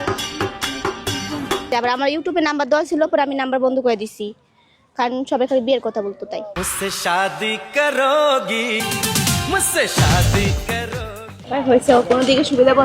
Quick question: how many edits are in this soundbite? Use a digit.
2